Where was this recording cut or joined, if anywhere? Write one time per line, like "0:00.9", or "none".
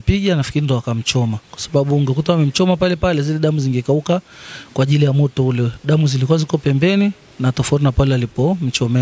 none